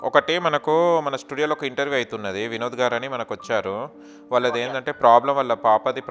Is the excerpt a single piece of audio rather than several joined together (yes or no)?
yes